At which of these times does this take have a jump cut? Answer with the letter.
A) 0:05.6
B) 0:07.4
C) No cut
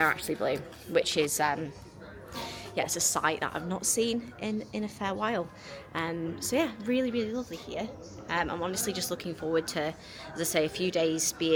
C